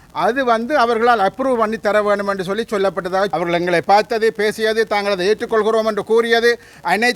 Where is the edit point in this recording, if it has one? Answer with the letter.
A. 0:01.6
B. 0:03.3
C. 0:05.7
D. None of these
B